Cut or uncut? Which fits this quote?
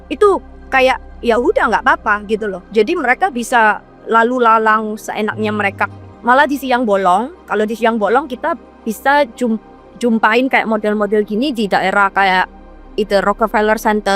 cut